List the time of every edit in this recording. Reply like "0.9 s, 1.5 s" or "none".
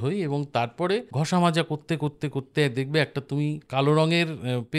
1.1 s, 3.6 s